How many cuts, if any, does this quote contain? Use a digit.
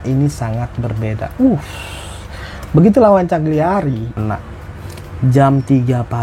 1